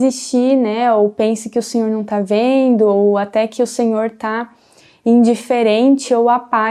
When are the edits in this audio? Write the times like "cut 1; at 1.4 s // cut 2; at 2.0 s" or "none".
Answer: none